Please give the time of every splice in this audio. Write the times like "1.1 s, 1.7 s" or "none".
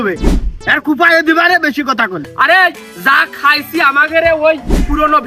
2.2 s